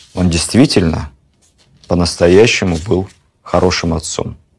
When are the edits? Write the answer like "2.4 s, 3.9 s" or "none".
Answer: none